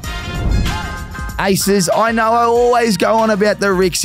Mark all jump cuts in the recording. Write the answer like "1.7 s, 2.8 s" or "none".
1.3 s